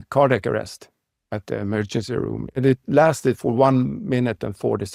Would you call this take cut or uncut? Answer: uncut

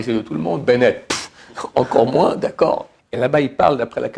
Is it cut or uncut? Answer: cut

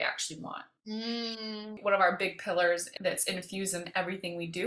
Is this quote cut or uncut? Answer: cut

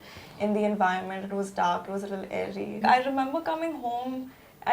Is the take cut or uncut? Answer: cut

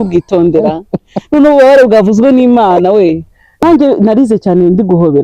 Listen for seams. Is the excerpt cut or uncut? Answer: cut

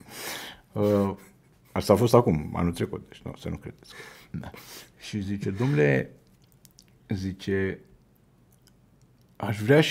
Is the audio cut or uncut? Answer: uncut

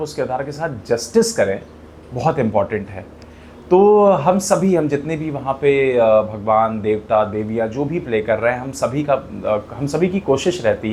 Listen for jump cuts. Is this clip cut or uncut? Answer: uncut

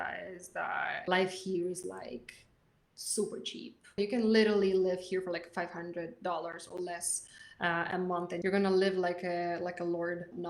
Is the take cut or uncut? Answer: cut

